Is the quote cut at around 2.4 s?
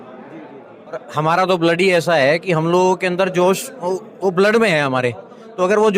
no; 1 cut; at 1.1 s

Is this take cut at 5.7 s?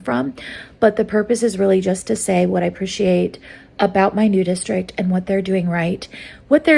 no; 0 cuts

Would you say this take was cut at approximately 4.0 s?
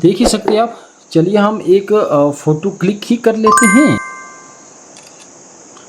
yes; 1 cut; at 4.0 s

